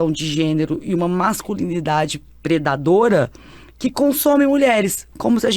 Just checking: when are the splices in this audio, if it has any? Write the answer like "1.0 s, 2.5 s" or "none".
none